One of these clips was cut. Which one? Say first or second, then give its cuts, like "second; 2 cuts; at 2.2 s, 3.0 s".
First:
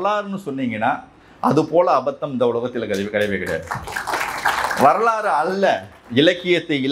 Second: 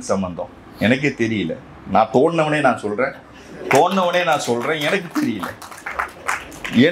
first; 1 cut; at 5.9 s